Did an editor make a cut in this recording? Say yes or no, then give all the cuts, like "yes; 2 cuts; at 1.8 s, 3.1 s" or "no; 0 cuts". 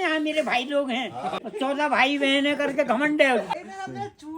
yes; 2 cuts; at 1.4 s, 3.5 s